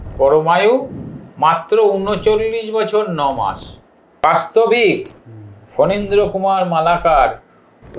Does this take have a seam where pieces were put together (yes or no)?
yes